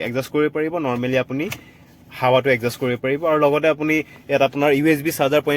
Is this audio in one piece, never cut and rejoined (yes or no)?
yes